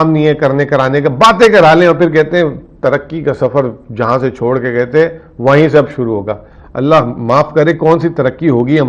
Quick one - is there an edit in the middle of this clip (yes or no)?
no